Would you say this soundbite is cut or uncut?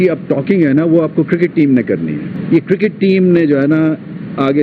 cut